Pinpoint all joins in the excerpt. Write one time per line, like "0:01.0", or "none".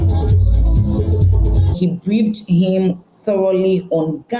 0:01.8